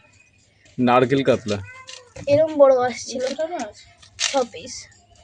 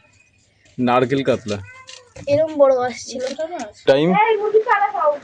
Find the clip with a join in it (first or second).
second